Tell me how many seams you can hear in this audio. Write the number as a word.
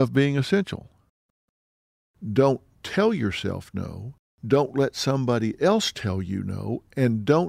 one